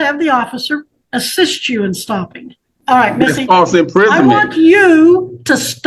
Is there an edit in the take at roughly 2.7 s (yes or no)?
yes